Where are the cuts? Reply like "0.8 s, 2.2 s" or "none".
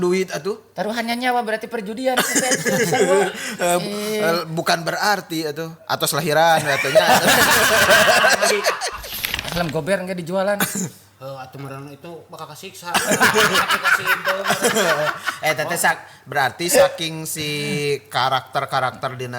9.0 s